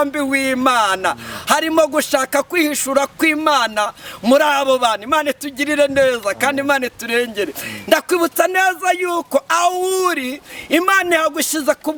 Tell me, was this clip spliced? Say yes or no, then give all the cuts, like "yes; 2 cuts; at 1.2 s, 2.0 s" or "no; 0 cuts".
no; 0 cuts